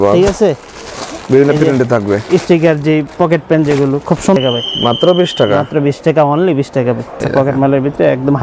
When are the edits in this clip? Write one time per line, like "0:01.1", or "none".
0:04.4
0:07.2

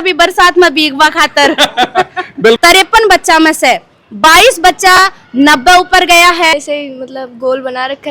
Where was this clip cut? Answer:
0:02.6
0:06.5

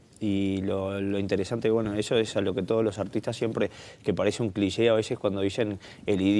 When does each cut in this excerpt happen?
0:05.1

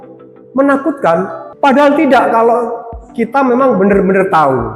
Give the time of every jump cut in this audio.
0:01.4

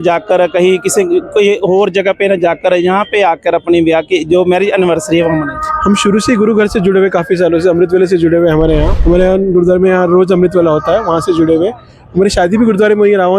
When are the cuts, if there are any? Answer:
0:08.9

